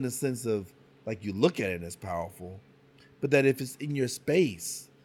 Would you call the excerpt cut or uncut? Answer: uncut